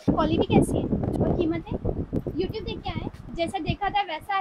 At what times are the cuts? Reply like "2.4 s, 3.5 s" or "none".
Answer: 1.2 s, 2.2 s, 3.3 s